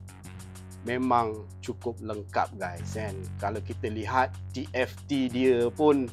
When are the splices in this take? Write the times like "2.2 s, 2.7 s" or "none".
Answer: none